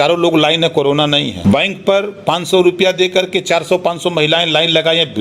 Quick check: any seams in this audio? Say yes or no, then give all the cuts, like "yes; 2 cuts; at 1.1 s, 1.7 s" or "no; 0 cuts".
yes; 1 cut; at 1.4 s